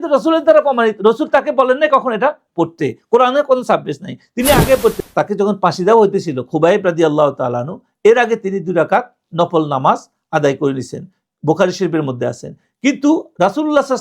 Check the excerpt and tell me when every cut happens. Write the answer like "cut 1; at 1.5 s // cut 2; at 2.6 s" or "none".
cut 1; at 5.0 s